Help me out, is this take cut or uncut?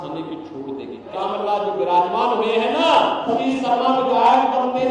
cut